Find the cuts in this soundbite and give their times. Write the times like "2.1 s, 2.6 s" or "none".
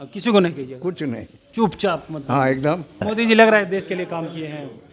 3.0 s